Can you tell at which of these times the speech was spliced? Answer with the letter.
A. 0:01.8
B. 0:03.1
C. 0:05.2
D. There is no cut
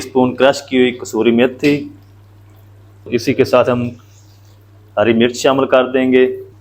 B